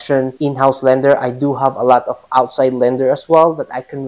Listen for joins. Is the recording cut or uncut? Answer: uncut